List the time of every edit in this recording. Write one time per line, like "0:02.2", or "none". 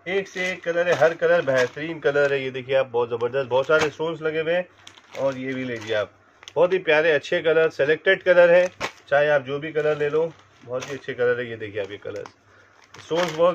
none